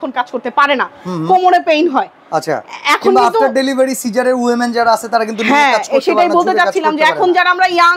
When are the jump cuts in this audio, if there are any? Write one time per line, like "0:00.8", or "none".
none